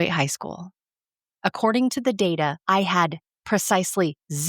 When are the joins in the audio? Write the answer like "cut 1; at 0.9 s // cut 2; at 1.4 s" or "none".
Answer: cut 1; at 2.6 s // cut 2; at 3.3 s

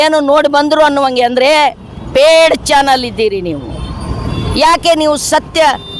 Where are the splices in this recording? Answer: none

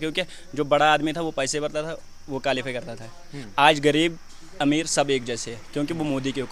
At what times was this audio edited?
none

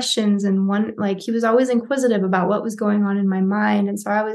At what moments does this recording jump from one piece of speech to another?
none

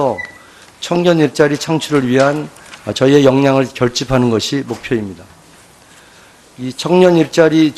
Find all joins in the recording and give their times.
none

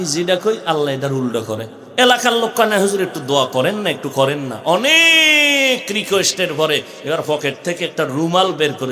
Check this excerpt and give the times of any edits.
cut 1; at 1.8 s

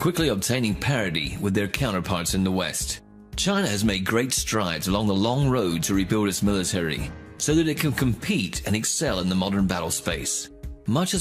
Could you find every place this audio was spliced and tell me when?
cut 1; at 2.6 s

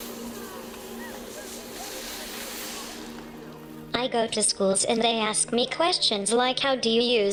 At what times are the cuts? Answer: none

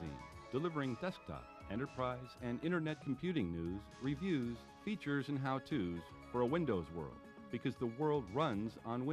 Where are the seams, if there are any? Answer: none

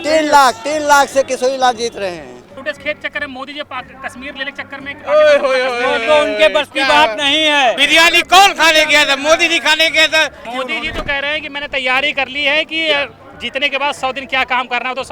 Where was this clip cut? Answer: cut 1; at 2.4 s // cut 2; at 7.8 s // cut 3; at 10.4 s

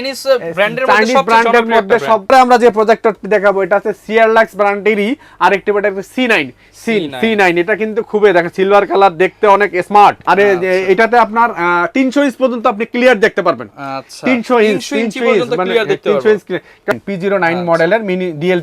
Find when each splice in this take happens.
cut 1; at 2.3 s // cut 2; at 10.2 s // cut 3; at 16.9 s

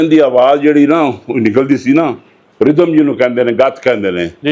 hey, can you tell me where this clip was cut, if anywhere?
none

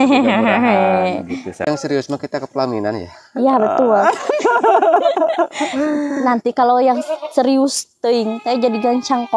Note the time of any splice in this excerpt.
cut 1; at 1.7 s

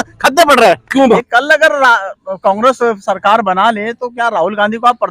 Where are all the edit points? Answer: cut 1; at 1.2 s

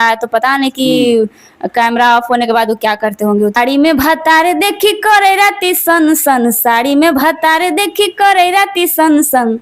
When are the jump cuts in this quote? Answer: cut 1; at 3.6 s

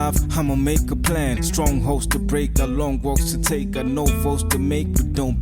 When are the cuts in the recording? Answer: none

